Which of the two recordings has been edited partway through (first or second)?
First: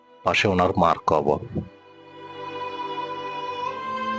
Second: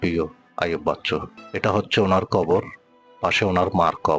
second